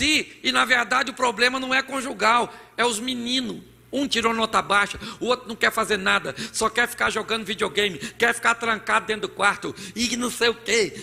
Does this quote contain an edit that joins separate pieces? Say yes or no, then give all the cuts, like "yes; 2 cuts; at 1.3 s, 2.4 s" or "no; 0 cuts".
no; 0 cuts